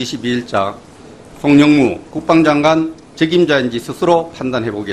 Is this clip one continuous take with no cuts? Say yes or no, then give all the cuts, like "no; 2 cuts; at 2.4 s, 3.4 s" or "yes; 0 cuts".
yes; 0 cuts